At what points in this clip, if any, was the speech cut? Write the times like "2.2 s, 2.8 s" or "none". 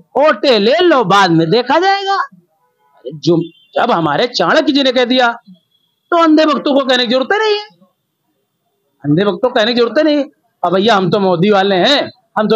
none